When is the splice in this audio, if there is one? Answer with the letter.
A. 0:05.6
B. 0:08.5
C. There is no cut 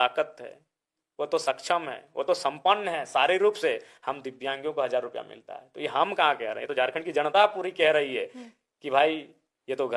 C